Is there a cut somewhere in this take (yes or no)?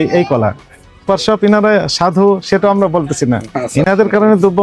yes